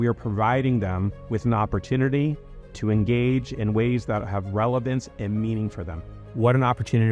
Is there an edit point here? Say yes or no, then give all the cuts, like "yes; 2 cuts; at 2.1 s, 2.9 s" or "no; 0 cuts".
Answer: yes; 1 cut; at 6.1 s